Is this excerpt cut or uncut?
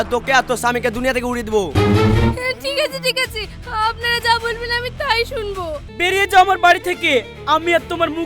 cut